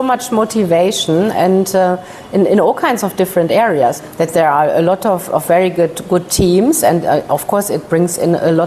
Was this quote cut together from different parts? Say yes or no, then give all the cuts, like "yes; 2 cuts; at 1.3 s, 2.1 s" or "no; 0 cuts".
yes; 1 cut; at 4.0 s